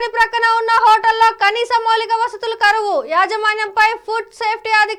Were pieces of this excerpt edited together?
no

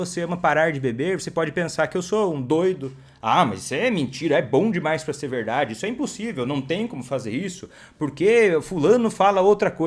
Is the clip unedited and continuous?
yes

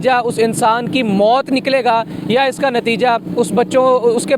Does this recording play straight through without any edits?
yes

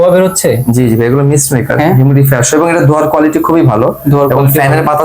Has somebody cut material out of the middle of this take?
no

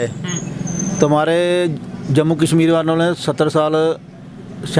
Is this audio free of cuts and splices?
yes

